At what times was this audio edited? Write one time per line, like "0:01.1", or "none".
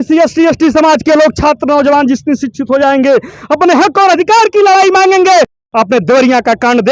0:05.6